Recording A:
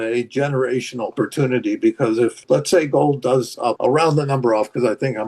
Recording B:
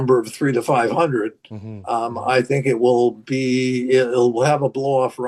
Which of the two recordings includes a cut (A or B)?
A